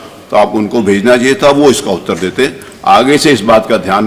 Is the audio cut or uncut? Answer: uncut